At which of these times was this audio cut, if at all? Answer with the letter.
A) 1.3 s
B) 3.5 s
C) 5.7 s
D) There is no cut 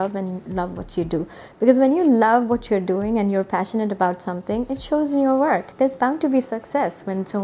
C